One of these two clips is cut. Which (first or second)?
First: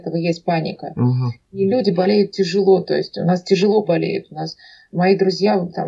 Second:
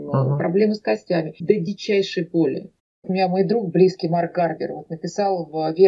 second